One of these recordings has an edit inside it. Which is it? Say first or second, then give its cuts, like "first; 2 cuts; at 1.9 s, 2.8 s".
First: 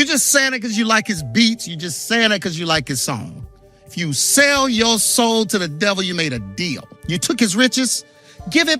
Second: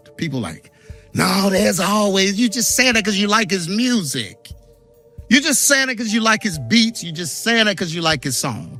first; 1 cut; at 6.9 s